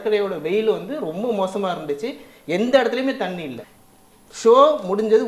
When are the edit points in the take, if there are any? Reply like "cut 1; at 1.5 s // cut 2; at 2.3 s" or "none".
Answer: cut 1; at 3.6 s